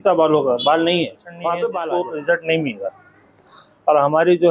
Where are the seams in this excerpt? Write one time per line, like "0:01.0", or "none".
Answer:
0:01.8

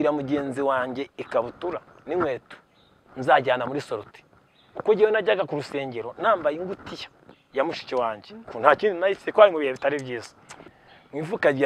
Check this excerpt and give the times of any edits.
0:10.8

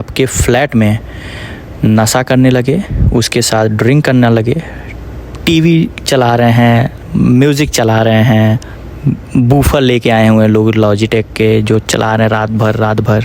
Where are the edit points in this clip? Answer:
none

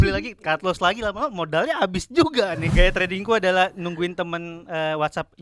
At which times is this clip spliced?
0:02.7

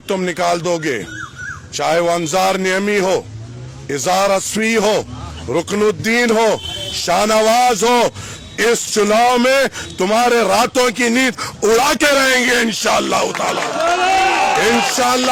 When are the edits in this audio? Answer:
none

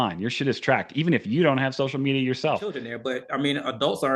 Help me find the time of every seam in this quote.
0:02.9

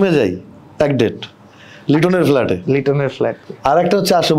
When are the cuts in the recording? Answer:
none

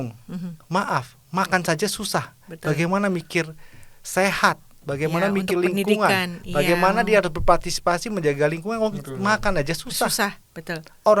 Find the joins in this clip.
none

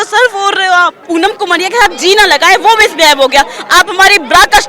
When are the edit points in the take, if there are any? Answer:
0:01.0

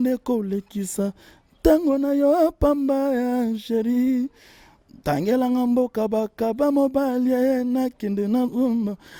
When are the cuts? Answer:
none

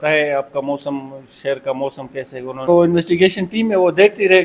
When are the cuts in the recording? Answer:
0:02.7

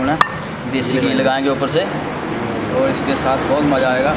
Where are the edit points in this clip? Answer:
none

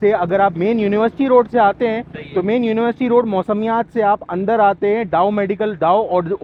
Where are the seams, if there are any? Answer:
none

